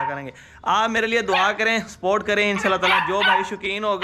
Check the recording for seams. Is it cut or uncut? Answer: uncut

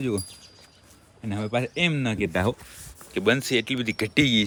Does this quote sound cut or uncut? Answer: uncut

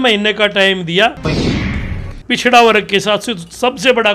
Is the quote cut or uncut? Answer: cut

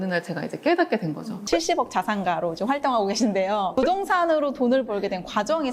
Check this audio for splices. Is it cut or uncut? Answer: cut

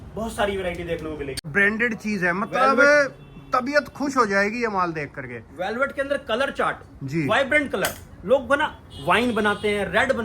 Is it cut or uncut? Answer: cut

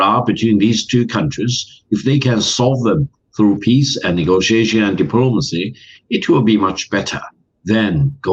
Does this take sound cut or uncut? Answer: uncut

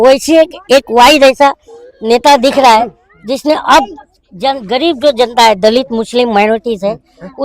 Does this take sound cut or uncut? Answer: uncut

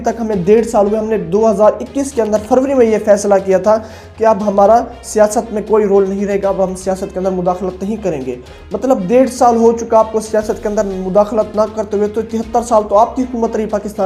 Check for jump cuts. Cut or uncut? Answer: uncut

